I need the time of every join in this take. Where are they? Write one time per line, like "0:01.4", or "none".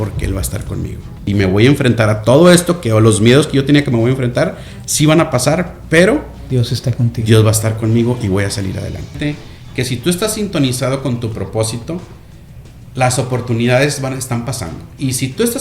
0:01.2
0:09.2